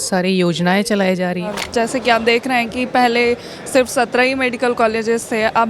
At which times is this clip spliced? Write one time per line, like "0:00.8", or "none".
0:01.5